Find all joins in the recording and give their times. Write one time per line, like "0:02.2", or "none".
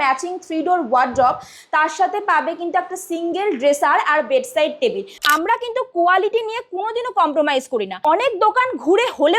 0:05.2
0:07.9

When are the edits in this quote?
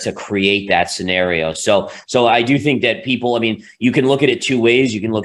none

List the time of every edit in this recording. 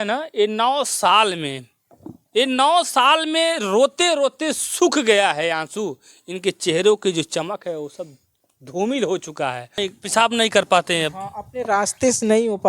0:09.7

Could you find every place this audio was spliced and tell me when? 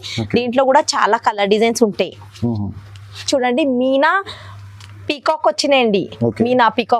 0:03.2

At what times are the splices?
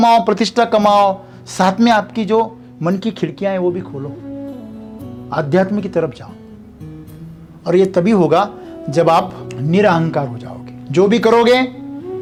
none

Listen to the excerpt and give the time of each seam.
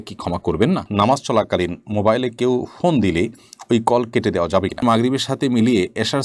0:00.9
0:04.8

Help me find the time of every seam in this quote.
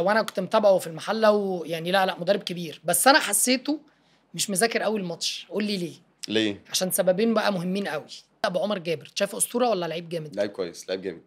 0:08.4

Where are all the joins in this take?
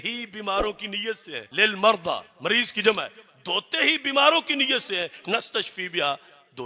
none

